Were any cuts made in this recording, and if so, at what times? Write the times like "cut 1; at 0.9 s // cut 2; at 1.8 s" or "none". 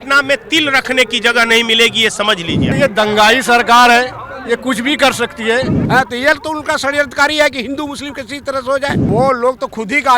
cut 1; at 2.6 s // cut 2; at 5.8 s // cut 3; at 9.0 s